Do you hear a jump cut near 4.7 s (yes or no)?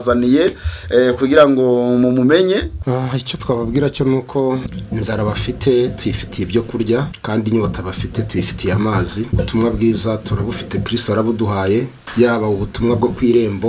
yes